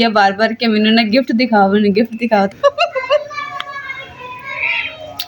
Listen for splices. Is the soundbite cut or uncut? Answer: cut